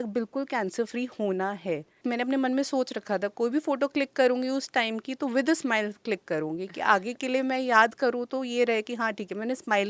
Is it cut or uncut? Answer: cut